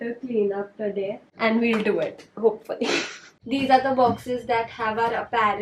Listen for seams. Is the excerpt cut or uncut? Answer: uncut